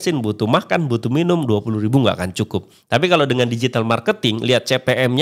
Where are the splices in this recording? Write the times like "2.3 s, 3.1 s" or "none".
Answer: none